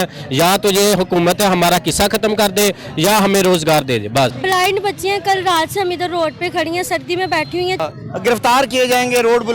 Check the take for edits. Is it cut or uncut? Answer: cut